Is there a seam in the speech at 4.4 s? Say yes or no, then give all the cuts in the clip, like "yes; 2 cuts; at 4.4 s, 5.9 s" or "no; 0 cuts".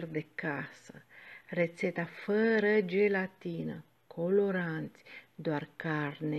no; 0 cuts